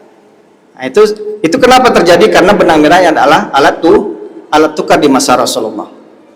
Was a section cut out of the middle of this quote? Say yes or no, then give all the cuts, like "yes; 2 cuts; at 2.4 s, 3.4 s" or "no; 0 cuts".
no; 0 cuts